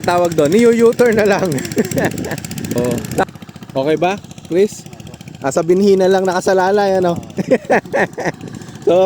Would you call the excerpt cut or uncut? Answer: cut